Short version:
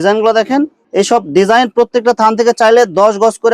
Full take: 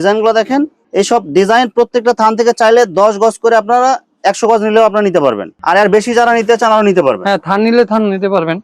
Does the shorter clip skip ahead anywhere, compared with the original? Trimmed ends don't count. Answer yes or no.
no